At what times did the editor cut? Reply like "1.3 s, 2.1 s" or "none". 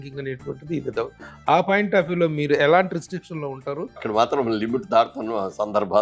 4.0 s